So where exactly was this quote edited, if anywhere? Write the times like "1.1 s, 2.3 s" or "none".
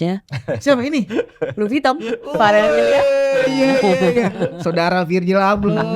none